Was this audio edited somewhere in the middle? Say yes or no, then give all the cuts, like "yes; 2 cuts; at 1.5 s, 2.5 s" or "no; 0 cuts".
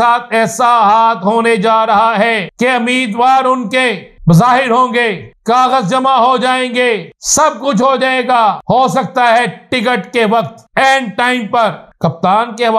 yes; 7 cuts; at 2.5 s, 4.1 s, 5.3 s, 7.2 s, 8.6 s, 10.6 s, 11.9 s